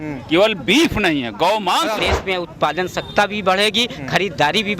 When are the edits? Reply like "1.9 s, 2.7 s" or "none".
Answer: 2.1 s

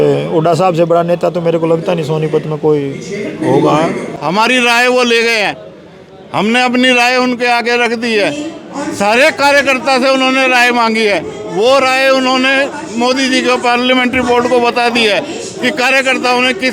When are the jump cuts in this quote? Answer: 4.1 s

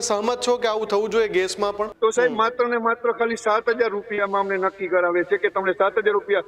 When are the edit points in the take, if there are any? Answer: 1.9 s

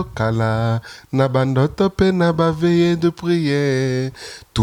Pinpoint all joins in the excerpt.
none

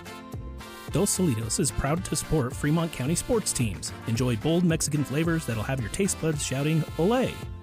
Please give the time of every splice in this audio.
0.9 s

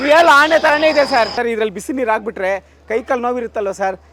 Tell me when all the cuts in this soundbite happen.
1.4 s

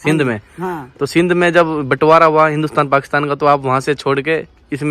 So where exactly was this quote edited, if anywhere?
none

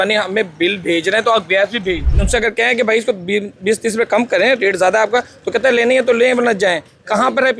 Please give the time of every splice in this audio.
2.0 s

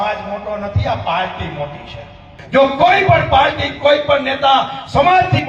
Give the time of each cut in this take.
2.4 s

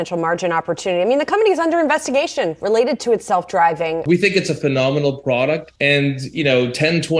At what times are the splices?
4.0 s, 5.7 s

